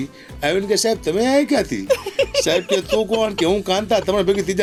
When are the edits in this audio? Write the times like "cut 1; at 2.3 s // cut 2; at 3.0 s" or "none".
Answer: none